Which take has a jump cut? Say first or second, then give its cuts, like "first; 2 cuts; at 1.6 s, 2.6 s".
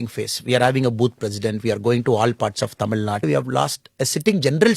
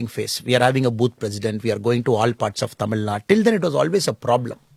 first; 1 cut; at 3.2 s